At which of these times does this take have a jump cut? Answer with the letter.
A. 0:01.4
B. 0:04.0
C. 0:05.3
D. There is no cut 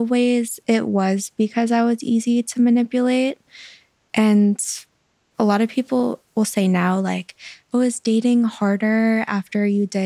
C